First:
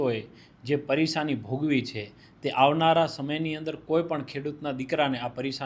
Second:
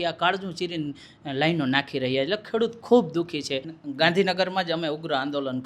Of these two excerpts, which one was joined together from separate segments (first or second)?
second